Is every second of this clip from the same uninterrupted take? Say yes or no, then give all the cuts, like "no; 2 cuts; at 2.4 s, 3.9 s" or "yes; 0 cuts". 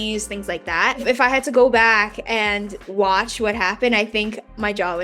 no; 2 cuts; at 1.0 s, 2.9 s